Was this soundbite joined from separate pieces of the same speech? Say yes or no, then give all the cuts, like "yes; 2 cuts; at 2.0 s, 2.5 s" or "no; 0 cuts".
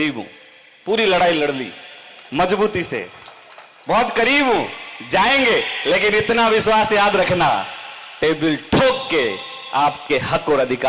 no; 0 cuts